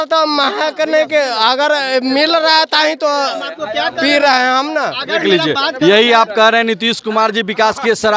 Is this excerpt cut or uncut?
uncut